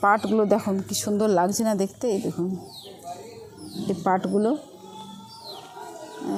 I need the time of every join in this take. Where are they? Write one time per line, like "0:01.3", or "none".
none